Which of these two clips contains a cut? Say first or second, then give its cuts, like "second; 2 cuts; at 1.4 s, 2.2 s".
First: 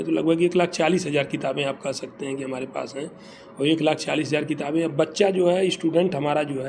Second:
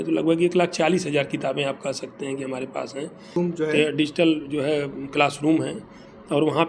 second; 1 cut; at 3.4 s